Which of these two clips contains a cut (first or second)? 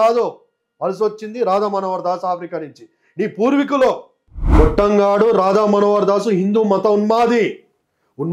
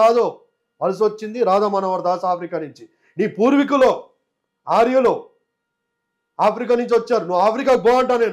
first